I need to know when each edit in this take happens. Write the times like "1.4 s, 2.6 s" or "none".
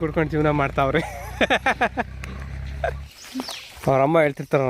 3.0 s